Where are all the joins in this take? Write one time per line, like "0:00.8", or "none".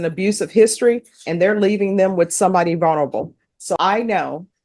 0:03.6